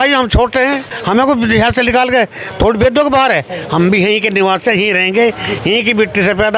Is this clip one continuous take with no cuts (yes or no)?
no